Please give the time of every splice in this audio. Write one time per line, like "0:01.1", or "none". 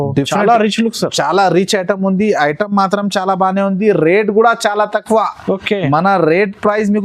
none